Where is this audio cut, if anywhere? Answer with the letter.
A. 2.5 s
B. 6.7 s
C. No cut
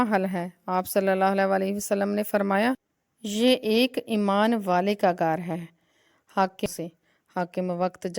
B